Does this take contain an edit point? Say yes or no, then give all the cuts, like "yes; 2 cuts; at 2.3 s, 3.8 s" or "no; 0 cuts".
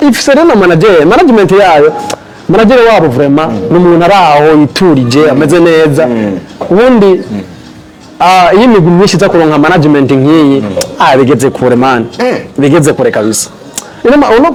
no; 0 cuts